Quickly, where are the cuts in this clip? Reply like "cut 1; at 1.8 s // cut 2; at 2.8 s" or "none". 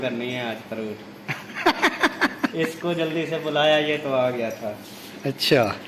none